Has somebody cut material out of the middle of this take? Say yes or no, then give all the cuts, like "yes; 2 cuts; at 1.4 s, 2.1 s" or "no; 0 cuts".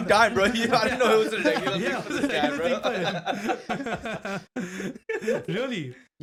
no; 0 cuts